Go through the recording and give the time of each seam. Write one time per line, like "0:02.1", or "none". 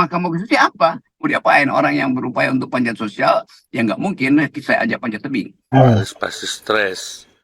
0:01.1
0:05.6